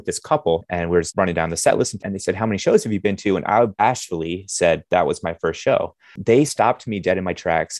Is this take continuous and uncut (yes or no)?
no